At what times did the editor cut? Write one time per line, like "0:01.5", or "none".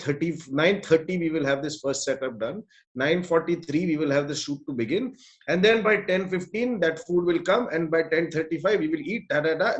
none